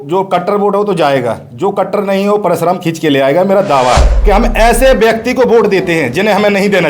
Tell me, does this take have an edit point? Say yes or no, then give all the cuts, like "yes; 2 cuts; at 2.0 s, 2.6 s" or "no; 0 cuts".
yes; 1 cut; at 4.1 s